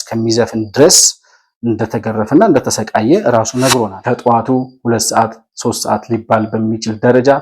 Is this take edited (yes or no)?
yes